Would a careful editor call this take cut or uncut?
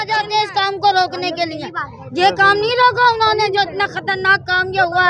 uncut